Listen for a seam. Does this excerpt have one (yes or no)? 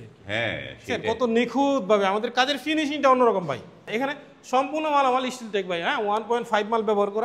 yes